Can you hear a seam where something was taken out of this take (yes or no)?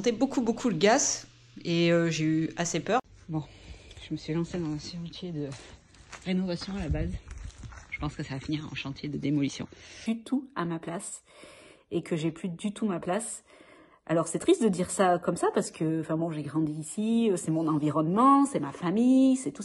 yes